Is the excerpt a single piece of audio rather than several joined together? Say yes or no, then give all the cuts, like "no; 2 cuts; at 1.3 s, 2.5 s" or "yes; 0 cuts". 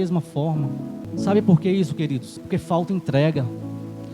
no; 2 cuts; at 1.0 s, 2.3 s